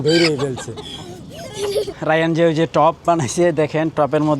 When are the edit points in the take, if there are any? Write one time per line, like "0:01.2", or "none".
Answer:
0:01.9